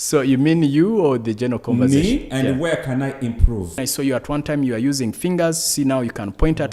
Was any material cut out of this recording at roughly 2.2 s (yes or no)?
no